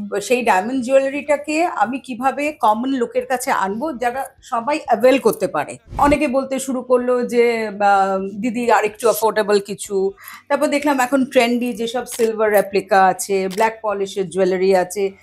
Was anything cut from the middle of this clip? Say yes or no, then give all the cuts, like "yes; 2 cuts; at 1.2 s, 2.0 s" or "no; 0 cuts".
yes; 1 cut; at 6.0 s